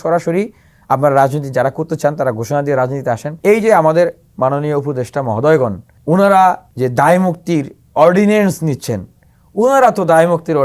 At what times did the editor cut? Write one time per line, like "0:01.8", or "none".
0:03.3
0:05.9
0:06.7